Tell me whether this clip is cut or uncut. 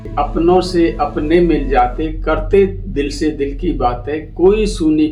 uncut